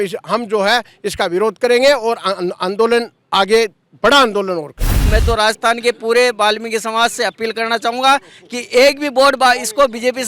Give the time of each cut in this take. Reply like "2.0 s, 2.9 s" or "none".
5.1 s